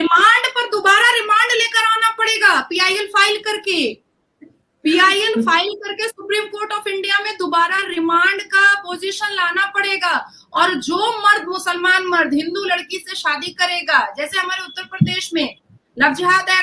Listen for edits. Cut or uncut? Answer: uncut